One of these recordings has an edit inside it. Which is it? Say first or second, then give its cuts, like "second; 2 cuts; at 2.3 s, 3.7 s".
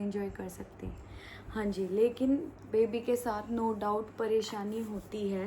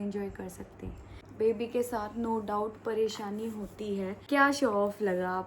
second; 2 cuts; at 1.2 s, 4.2 s